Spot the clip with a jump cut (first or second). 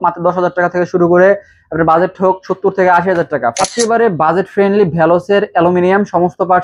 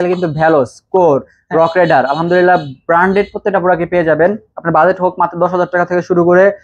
first